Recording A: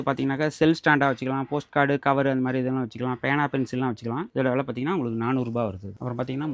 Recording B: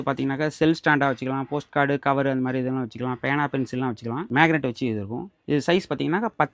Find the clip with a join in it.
B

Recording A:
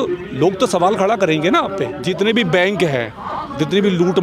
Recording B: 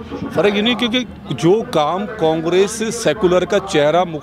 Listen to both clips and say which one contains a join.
A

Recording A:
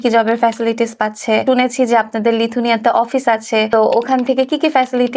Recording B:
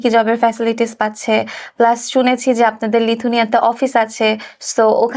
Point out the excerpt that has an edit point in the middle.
A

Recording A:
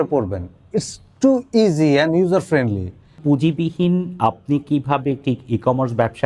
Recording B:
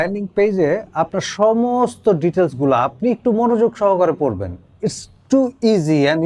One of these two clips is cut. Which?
A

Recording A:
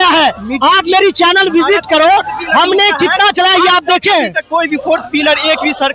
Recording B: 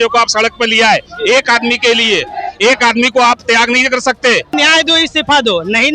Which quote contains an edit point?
B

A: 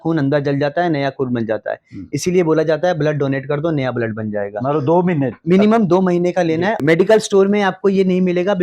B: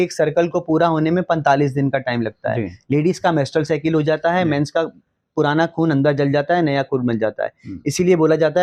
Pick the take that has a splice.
A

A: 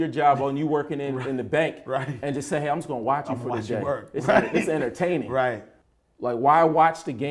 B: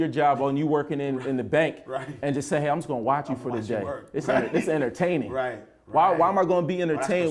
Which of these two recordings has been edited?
A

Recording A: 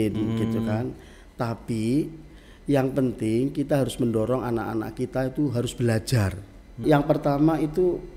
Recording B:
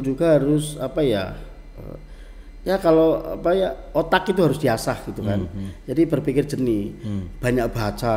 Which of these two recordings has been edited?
A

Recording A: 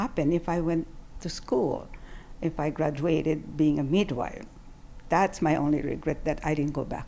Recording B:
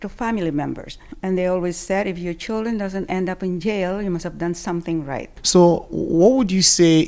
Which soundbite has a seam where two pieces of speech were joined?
B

